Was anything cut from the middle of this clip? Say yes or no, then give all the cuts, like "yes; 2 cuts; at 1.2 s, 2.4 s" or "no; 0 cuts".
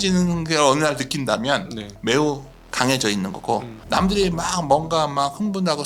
yes; 1 cut; at 3.8 s